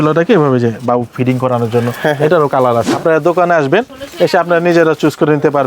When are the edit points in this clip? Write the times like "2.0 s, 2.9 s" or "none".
2.9 s